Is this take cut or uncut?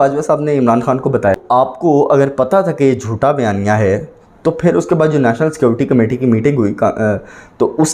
cut